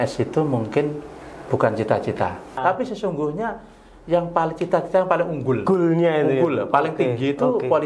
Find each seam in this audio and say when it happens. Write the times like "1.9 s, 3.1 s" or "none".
2.6 s